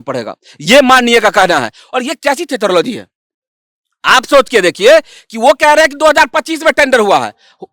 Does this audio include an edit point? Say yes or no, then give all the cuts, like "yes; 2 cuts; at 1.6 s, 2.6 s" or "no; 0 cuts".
no; 0 cuts